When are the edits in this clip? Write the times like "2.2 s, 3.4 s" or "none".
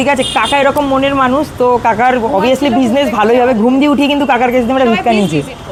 none